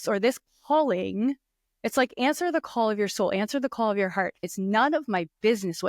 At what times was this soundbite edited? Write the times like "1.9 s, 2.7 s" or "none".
4.5 s